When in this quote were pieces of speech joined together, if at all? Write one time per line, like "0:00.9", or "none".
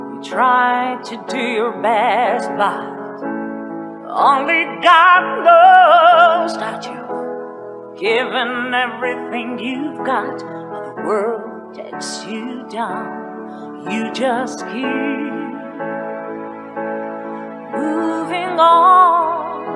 0:18.8